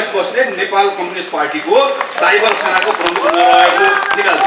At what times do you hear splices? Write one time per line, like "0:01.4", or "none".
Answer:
none